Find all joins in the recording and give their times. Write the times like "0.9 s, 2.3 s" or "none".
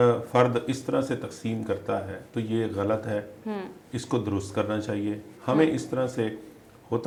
none